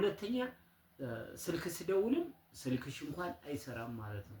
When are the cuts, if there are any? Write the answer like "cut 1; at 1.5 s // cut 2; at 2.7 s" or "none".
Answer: none